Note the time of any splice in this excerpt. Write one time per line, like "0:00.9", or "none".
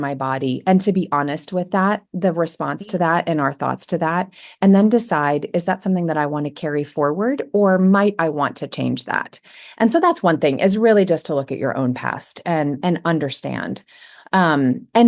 none